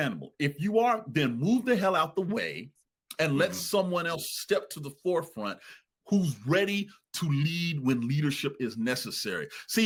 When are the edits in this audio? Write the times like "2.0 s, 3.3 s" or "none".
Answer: none